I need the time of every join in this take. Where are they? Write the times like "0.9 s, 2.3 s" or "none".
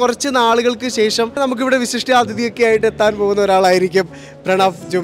1.4 s